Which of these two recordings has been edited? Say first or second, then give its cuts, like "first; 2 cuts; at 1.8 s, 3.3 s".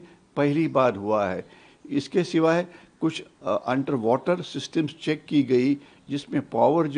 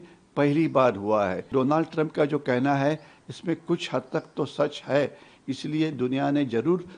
second; 1 cut; at 1.4 s